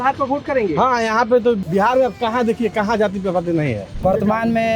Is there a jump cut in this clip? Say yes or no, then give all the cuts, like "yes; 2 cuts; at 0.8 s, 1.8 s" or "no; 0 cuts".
yes; 2 cuts; at 1.6 s, 3.9 s